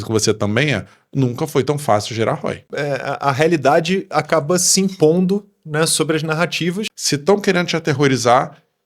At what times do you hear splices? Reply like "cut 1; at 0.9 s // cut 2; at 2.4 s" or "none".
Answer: cut 1; at 2.7 s // cut 2; at 6.9 s